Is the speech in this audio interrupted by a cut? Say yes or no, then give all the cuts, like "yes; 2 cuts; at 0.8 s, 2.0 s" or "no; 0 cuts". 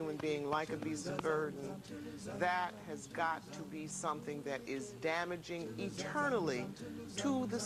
no; 0 cuts